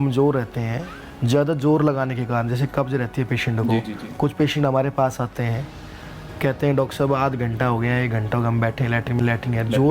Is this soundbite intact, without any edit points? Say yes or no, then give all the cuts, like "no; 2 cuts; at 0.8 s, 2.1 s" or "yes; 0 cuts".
yes; 0 cuts